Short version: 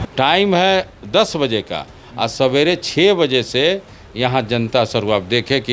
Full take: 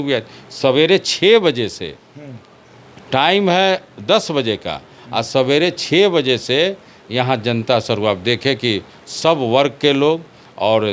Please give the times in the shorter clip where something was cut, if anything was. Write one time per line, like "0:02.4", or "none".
none